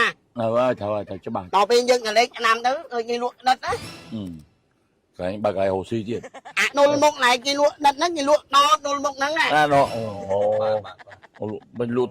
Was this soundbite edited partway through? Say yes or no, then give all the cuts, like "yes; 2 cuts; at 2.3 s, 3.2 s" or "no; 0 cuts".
yes; 3 cuts; at 1.4 s, 6.6 s, 11.2 s